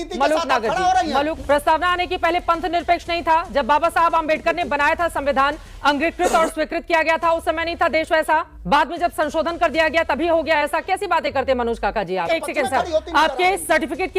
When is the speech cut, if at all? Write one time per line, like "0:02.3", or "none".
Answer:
0:01.4
0:08.5
0:12.3